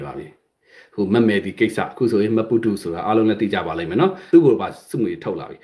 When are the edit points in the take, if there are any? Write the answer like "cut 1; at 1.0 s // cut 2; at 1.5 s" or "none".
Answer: cut 1; at 4.2 s